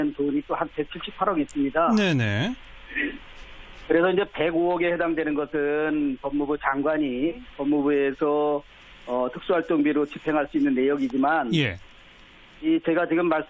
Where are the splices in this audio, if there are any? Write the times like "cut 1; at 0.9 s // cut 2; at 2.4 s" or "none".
cut 1; at 4.5 s